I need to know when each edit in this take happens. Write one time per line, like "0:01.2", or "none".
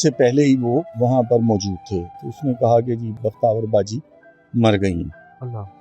0:00.9
0:02.1
0:03.1

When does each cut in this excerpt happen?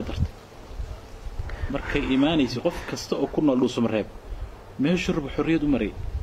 none

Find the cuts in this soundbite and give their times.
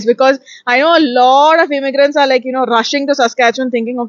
none

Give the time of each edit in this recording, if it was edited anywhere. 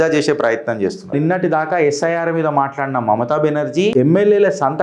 0:01.1
0:03.9

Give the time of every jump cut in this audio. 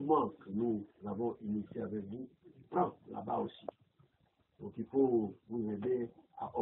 0:02.7

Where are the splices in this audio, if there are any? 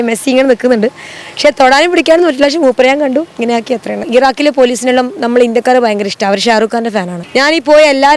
0:04.0
0:07.2

